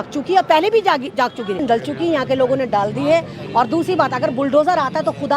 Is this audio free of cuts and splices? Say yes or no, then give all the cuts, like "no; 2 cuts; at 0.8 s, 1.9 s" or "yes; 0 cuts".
no; 1 cut; at 1.6 s